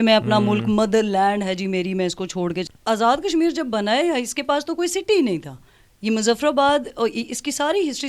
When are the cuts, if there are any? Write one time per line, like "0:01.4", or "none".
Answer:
0:02.7